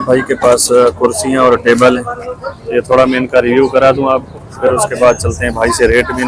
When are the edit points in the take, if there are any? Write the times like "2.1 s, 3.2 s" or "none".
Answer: none